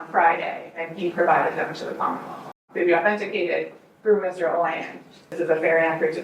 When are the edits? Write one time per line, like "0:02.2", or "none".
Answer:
0:02.6
0:05.4